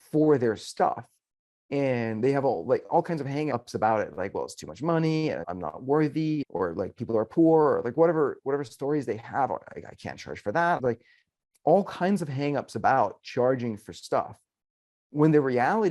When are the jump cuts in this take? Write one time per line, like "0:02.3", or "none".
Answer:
0:03.5
0:05.5
0:06.5
0:10.8